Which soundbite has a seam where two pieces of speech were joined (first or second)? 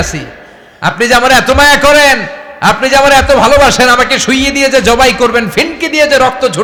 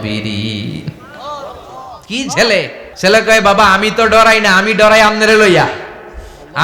second